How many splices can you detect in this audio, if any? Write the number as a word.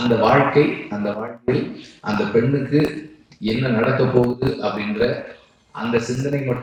zero